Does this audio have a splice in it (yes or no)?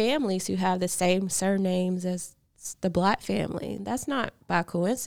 yes